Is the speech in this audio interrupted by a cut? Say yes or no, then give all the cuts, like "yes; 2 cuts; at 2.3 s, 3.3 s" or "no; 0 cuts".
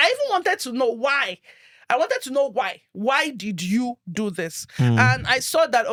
no; 0 cuts